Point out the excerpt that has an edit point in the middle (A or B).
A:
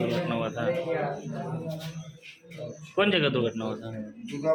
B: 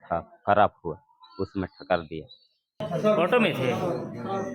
B